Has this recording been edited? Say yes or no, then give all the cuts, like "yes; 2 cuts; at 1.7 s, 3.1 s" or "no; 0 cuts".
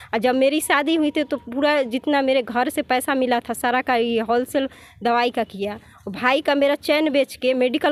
no; 0 cuts